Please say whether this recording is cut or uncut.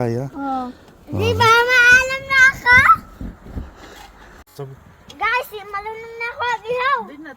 cut